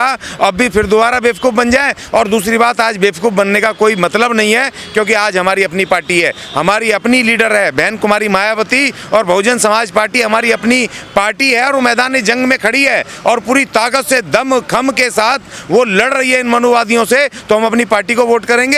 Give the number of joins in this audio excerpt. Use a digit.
0